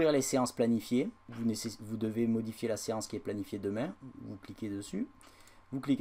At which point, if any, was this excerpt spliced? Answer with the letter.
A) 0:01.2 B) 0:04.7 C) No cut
A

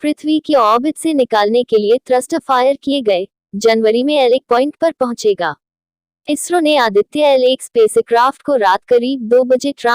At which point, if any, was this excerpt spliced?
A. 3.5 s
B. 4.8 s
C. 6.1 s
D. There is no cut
C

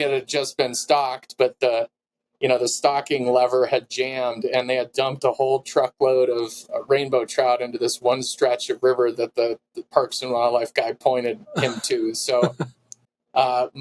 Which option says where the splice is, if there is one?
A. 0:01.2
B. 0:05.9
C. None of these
C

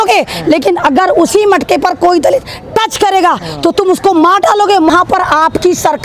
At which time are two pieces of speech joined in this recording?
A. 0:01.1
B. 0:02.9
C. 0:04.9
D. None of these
C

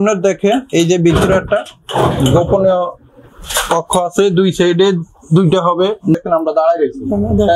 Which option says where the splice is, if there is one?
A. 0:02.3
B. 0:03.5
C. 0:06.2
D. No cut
C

